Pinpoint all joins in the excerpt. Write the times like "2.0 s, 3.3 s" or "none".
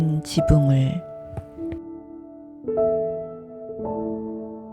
1.5 s